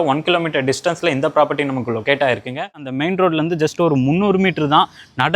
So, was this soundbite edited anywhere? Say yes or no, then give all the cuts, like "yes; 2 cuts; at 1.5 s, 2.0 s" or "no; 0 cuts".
yes; 1 cut; at 2.9 s